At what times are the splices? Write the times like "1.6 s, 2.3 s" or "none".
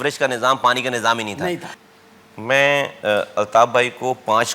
1.8 s